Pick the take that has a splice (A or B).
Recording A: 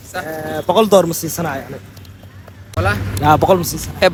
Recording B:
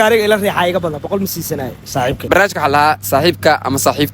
B